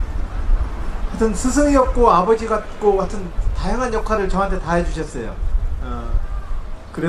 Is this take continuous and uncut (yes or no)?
no